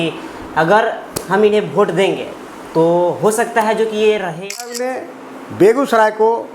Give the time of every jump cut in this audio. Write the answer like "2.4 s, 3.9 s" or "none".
4.7 s